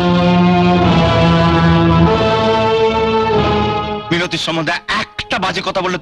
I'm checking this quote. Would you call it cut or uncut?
uncut